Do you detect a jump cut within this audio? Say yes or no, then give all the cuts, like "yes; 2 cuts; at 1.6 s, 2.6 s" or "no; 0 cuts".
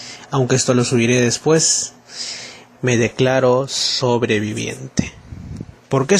no; 0 cuts